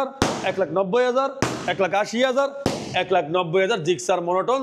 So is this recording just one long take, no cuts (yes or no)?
yes